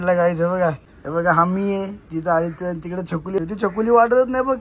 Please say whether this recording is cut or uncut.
cut